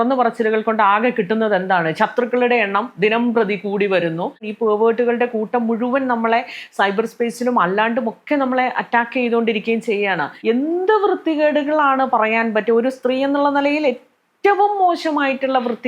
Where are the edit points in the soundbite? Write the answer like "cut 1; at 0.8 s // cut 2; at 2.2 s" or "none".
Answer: cut 1; at 4.5 s // cut 2; at 10.3 s